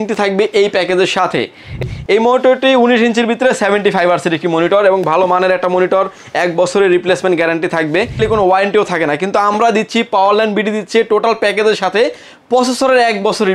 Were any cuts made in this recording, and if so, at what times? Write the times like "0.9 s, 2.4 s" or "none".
1.8 s, 8.2 s